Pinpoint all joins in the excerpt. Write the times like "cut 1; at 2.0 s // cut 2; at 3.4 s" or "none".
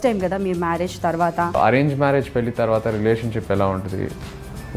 cut 1; at 1.5 s